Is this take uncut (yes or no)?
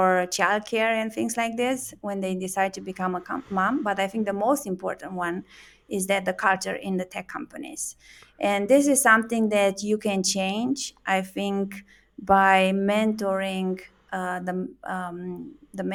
yes